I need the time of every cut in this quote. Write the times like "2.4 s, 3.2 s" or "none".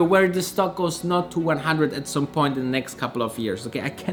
none